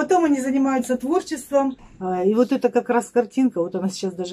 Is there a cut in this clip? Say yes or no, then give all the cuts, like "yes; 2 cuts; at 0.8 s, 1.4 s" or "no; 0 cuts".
yes; 1 cut; at 1.9 s